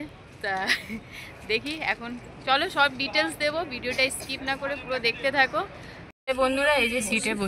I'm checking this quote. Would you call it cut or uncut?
cut